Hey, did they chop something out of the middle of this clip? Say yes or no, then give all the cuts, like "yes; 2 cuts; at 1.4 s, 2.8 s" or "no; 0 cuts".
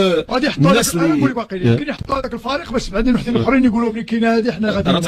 no; 0 cuts